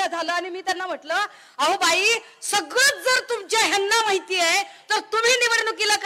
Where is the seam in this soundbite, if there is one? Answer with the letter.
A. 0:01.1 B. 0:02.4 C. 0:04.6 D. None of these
D